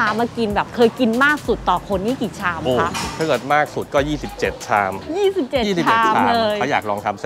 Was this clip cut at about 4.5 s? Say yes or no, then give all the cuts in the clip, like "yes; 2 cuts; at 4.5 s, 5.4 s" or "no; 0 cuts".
no; 0 cuts